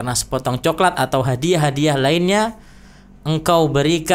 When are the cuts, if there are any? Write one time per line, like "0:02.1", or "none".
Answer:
none